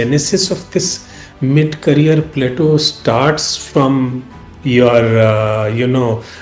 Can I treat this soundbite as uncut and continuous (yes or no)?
yes